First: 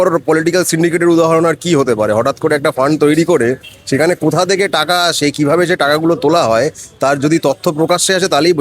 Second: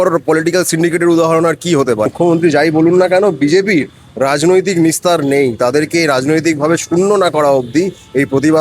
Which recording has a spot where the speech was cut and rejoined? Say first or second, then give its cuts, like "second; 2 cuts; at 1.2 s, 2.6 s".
second; 1 cut; at 2.1 s